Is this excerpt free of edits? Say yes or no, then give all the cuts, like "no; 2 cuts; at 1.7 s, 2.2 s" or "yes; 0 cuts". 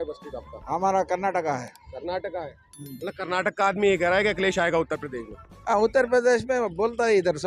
yes; 0 cuts